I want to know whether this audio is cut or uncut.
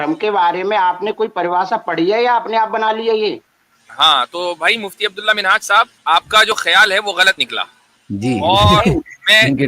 cut